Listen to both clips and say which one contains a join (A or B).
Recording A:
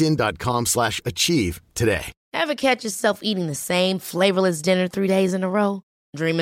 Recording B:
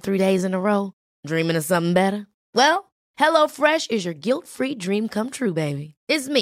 A